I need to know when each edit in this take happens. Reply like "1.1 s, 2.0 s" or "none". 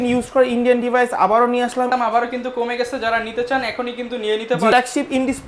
1.9 s, 4.7 s